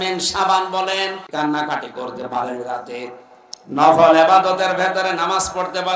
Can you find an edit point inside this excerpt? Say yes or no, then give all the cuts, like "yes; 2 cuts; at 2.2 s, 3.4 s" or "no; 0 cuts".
yes; 1 cut; at 1.3 s